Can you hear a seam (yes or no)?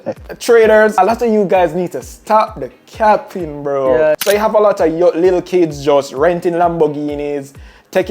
yes